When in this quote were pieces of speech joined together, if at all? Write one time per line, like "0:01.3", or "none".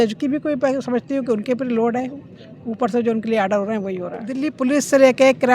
0:04.6